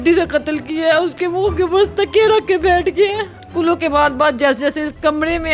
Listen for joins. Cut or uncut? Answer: cut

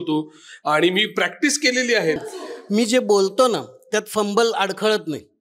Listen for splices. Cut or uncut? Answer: cut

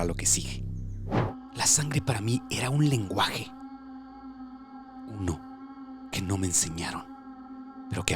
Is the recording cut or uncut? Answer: cut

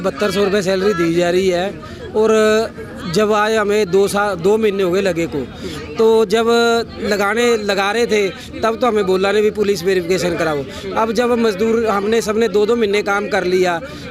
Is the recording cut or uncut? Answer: uncut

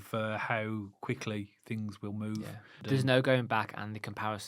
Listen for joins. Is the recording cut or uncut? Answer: cut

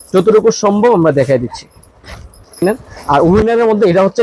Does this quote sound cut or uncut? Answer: cut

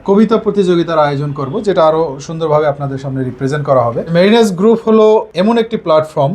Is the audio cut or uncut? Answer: cut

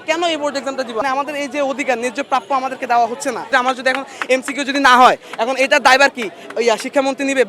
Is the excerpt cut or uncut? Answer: cut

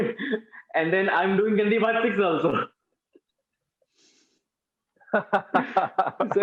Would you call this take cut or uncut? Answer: uncut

